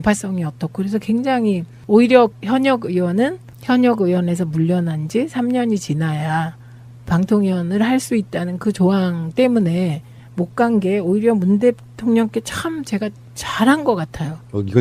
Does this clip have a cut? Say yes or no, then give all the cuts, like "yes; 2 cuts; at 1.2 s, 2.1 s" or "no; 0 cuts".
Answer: yes; 1 cut; at 9.7 s